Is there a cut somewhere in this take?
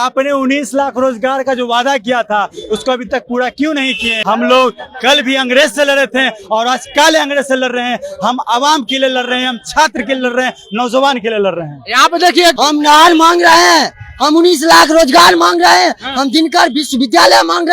yes; 2 cuts; at 4.1 s, 12.5 s

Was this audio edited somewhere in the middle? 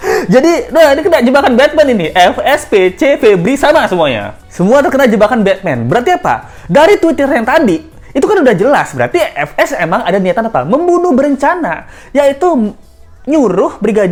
no; 0 cuts

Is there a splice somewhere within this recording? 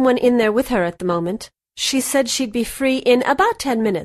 no; 0 cuts

